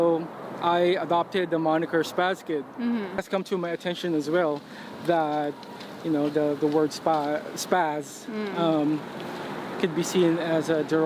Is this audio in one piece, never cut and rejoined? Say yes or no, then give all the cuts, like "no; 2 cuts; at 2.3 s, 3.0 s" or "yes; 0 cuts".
no; 1 cut; at 3.2 s